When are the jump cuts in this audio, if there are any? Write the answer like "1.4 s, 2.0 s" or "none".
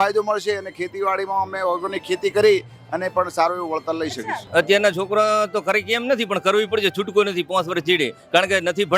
4.4 s